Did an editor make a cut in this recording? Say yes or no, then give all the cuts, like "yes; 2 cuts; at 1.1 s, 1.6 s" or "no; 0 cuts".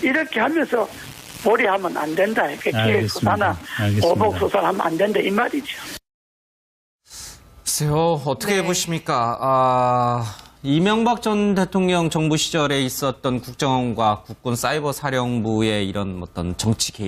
yes; 1 cut; at 16.0 s